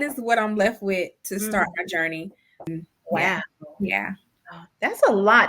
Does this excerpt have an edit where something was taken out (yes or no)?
yes